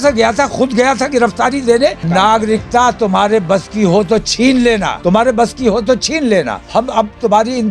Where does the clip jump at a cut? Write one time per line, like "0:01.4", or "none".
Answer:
0:02.0
0:04.9
0:06.6